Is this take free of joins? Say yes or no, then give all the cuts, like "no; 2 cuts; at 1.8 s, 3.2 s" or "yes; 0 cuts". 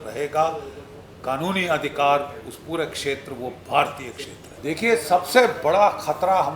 no; 1 cut; at 4.5 s